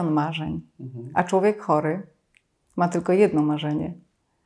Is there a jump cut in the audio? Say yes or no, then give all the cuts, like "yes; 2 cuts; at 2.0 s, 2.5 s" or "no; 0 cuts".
no; 0 cuts